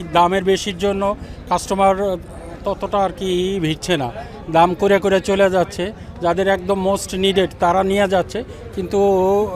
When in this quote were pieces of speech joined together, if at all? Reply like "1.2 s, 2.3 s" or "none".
none